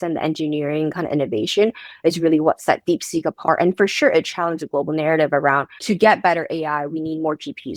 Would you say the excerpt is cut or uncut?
cut